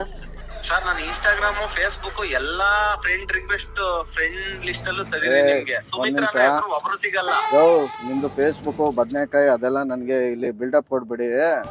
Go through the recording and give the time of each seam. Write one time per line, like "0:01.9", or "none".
none

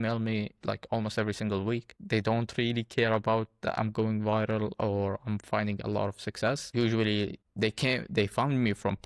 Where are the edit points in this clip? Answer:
0:01.9
0:06.7

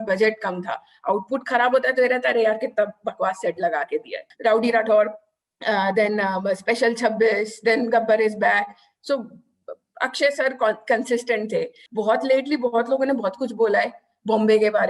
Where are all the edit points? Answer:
0:04.2
0:11.8

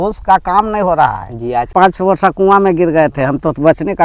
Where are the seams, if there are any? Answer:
0:01.7

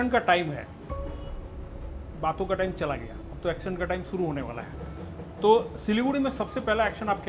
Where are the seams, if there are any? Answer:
none

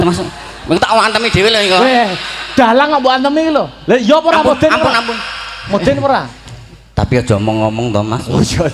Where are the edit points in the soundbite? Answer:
none

